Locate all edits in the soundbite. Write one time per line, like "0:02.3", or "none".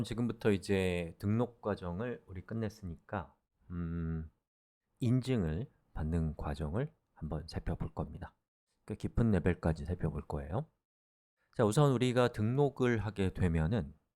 0:01.0